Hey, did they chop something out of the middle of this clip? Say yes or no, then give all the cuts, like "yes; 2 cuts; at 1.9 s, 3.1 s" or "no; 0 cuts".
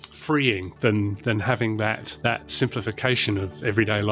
no; 0 cuts